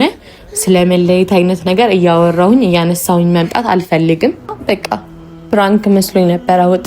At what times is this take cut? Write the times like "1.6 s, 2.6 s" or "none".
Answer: 4.5 s